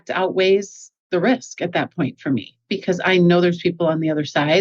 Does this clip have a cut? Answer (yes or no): yes